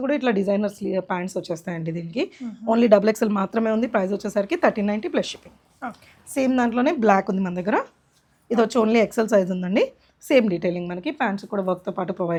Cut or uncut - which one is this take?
uncut